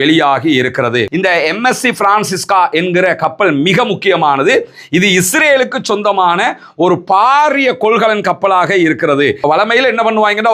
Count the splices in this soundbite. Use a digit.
2